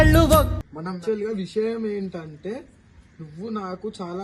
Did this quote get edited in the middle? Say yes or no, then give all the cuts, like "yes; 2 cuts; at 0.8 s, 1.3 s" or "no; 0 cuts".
yes; 1 cut; at 1.0 s